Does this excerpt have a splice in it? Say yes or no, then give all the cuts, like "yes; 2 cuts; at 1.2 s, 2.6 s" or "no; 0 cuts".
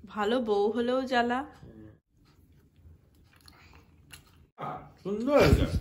yes; 2 cuts; at 1.9 s, 4.9 s